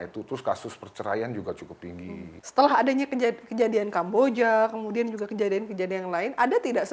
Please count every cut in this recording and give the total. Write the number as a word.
one